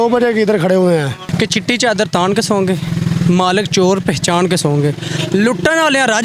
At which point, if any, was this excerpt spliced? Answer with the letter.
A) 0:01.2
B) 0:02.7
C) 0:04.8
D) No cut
A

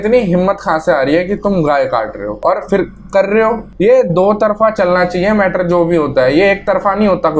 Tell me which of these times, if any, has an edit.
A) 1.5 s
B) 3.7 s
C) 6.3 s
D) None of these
B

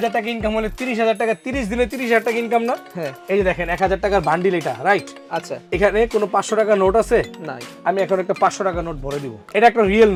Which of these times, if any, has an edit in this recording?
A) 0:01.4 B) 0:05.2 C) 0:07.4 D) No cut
D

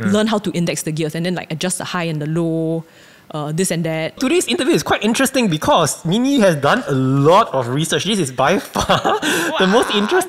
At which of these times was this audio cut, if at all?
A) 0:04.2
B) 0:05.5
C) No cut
A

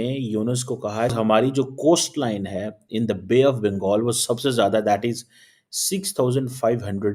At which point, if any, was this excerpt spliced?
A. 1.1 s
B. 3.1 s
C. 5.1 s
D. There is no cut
A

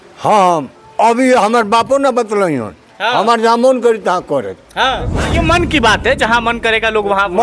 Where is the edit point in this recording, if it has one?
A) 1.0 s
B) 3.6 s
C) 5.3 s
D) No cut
C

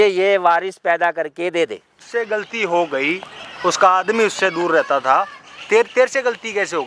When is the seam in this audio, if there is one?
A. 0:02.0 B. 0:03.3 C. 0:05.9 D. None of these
A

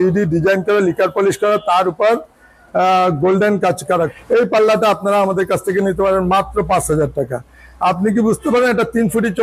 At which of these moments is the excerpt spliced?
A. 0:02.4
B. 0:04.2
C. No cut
B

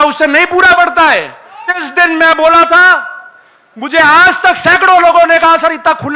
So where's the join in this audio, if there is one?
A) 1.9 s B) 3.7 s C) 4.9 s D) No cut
A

